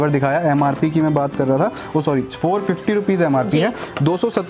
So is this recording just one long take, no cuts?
yes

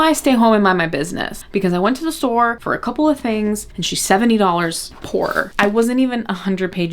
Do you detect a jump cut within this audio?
yes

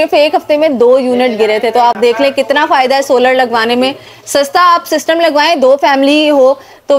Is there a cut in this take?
no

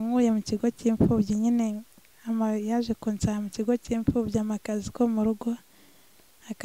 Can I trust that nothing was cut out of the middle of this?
yes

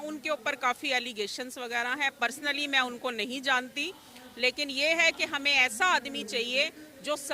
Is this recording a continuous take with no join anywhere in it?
yes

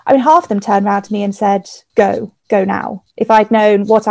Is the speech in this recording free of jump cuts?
no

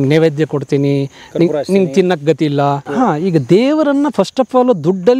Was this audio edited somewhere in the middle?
yes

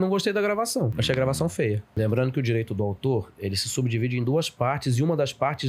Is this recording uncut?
no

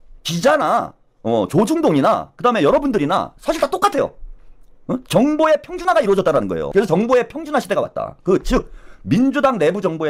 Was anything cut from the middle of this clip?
no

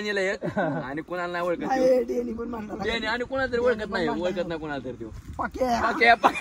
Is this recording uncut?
yes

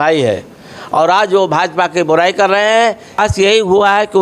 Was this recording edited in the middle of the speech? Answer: yes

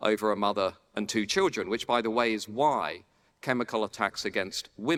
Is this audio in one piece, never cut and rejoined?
yes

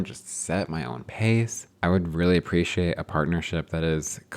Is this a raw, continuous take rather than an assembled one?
no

